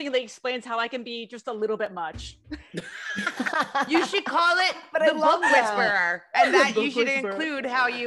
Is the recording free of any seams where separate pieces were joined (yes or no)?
yes